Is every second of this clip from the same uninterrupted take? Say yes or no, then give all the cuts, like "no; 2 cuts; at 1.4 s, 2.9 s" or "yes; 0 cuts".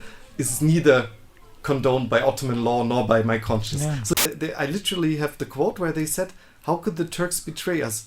no; 1 cut; at 4.1 s